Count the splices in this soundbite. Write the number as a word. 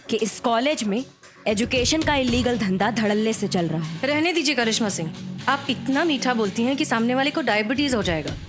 one